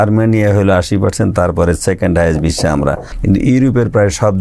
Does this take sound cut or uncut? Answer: cut